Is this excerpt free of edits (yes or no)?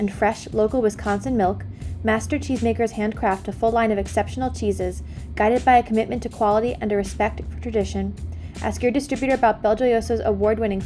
yes